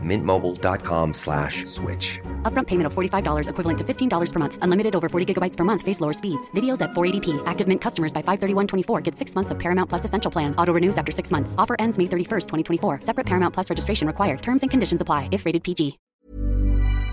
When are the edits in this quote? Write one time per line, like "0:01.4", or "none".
0:16.1